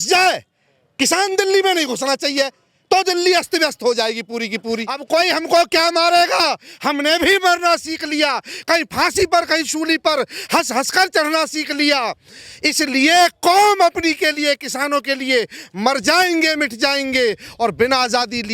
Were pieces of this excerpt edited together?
yes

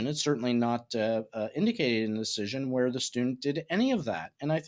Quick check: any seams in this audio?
no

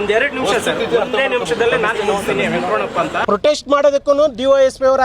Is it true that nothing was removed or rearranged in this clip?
no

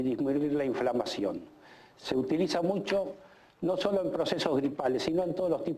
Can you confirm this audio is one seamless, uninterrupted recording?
no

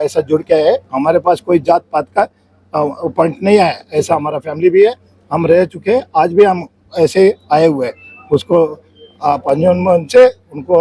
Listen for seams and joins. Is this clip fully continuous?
yes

